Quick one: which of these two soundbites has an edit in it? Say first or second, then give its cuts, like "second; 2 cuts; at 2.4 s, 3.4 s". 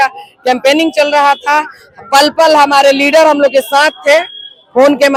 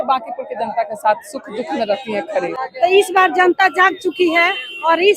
second; 1 cut; at 2.6 s